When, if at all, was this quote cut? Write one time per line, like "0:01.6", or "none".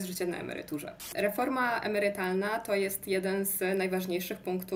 0:01.1